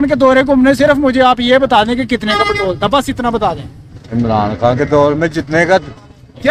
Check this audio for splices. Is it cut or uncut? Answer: uncut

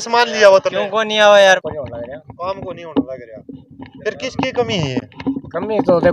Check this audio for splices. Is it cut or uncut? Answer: cut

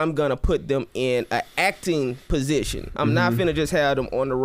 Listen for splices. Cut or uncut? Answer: uncut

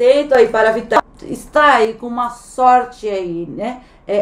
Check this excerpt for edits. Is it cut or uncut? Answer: cut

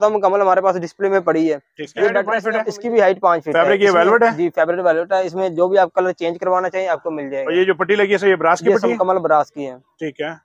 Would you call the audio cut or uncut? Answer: cut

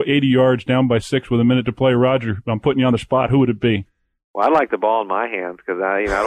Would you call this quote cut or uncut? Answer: uncut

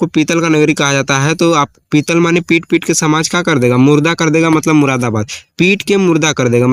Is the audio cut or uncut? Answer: uncut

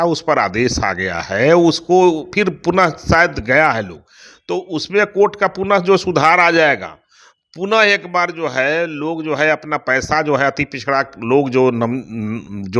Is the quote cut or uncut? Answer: uncut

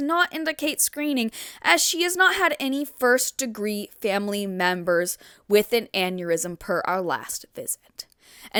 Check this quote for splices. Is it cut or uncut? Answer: uncut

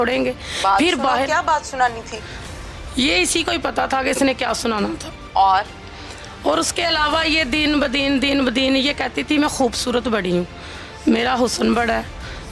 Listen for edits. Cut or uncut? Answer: uncut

